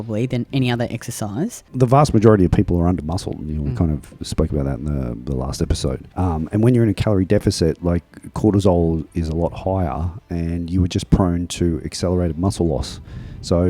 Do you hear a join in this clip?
yes; 1 cut; at 1.7 s

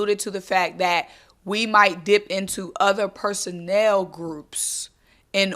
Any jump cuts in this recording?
no; 0 cuts

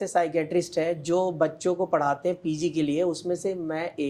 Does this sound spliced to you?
no; 0 cuts

